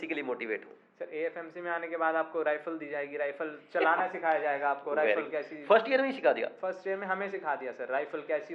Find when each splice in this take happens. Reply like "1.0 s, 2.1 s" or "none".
none